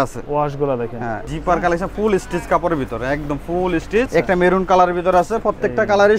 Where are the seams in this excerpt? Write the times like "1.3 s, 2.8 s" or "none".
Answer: 1.3 s, 4.1 s

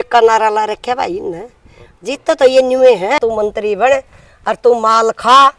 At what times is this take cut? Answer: 3.2 s

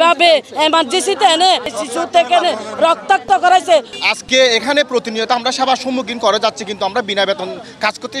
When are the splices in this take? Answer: 1.8 s, 4.0 s

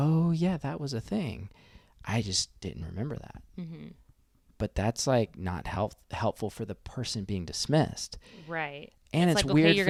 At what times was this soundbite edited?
none

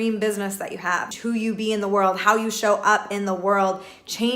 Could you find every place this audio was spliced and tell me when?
1.1 s

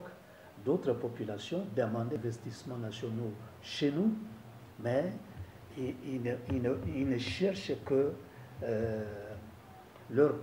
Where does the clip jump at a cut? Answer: 2.2 s

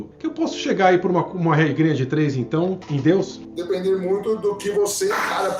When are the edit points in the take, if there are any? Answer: 3.5 s

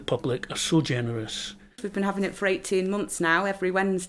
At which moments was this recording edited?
1.8 s

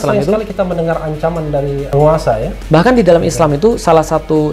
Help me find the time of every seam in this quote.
1.9 s, 2.5 s

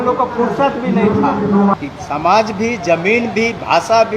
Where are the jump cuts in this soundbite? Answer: 1.8 s

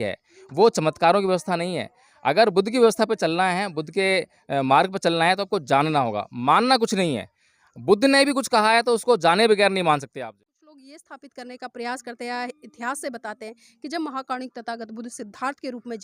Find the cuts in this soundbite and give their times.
10.2 s

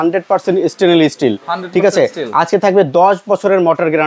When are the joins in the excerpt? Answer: none

